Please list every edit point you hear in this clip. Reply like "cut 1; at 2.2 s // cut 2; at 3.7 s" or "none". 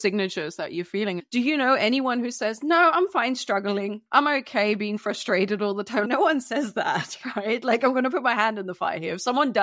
cut 1; at 1.2 s // cut 2; at 4.1 s // cut 3; at 6.1 s

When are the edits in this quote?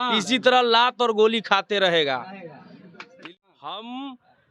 cut 1; at 3.1 s

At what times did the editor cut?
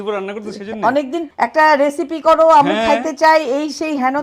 cut 1; at 1.2 s

